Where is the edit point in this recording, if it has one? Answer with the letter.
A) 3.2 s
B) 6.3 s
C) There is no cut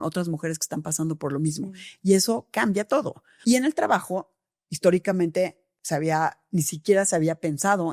A